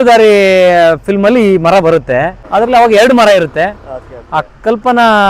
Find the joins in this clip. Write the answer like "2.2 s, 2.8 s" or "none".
2.4 s